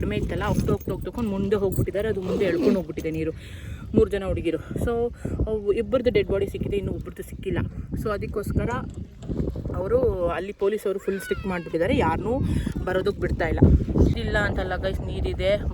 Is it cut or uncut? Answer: cut